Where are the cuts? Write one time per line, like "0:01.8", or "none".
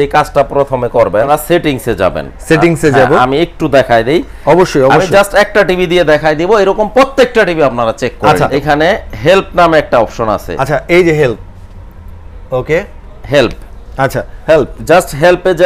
0:01.3
0:08.5